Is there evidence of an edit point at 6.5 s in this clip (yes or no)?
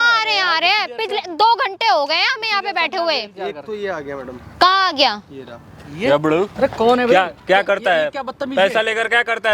yes